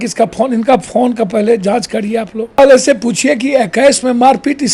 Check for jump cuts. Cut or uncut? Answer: cut